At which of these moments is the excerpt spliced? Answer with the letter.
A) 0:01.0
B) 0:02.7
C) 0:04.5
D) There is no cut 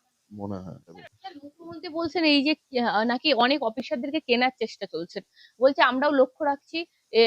A